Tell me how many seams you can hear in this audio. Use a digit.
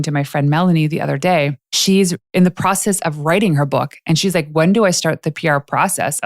1